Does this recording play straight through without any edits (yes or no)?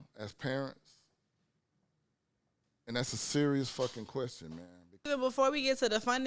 no